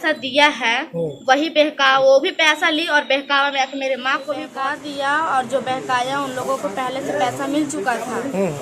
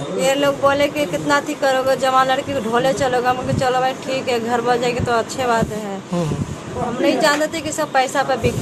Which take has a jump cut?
first; 1 cut; at 4.5 s

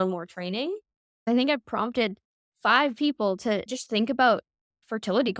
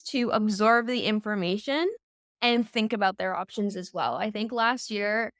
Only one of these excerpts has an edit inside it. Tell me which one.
first; 2 cuts; at 1.2 s, 3.7 s

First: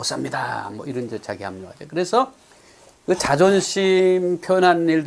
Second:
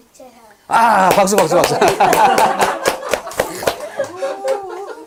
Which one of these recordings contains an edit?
first; 1 cut; at 1.7 s

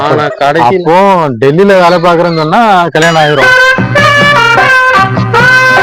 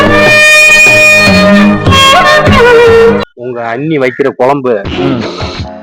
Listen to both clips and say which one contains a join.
second; 1 cut; at 3.2 s

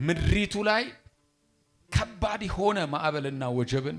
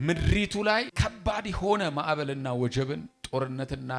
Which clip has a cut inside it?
second; 1 cut; at 0.9 s

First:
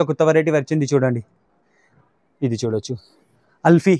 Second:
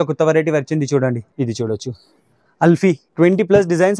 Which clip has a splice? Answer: second; 2 cuts; at 1.3 s, 3.1 s

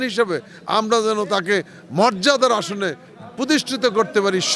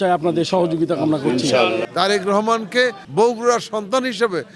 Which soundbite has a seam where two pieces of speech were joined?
second; 2 cuts; at 1.9 s, 3.0 s

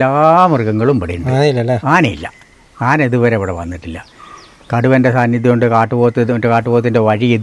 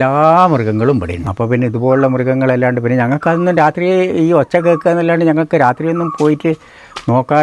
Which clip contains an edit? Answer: second; 1 cut; at 1.2 s

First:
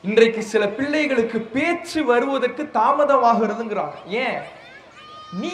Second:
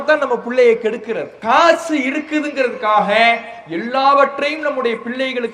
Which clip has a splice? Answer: second; 1 cut; at 1.3 s

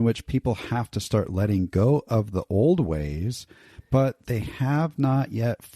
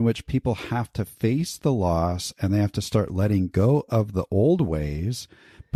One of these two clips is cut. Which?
first; 1 cut; at 1.0 s

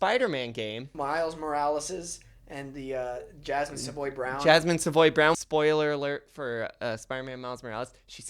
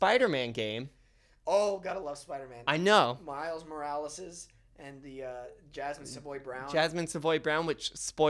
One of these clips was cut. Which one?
first; 2 cuts; at 0.9 s, 5.4 s

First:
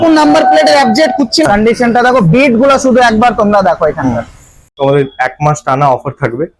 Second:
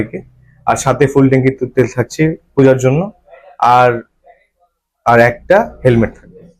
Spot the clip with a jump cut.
first; 2 cuts; at 1.4 s, 4.6 s

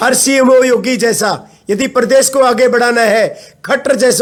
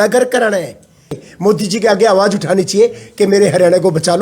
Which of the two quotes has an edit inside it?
second; 1 cut; at 1.1 s

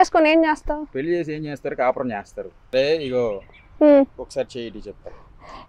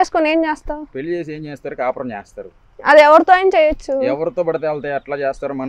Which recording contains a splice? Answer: first; 1 cut; at 2.6 s

